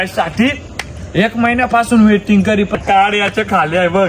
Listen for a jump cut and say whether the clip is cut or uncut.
cut